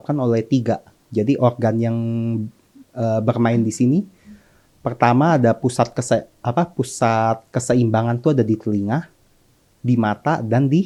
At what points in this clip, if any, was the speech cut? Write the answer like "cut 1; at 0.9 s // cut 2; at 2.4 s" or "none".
none